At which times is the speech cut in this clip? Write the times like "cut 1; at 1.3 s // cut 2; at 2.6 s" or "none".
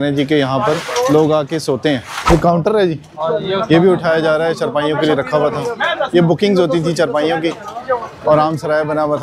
cut 1; at 2.3 s